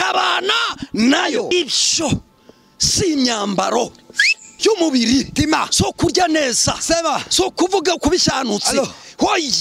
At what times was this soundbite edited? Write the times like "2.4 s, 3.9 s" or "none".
1.5 s

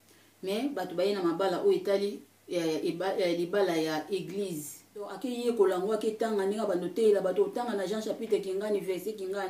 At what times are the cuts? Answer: 5.2 s

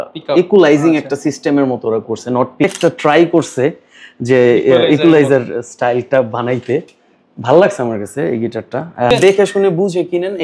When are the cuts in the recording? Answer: 2.6 s, 9.1 s

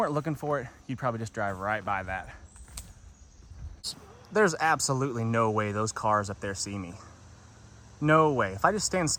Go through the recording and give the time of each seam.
none

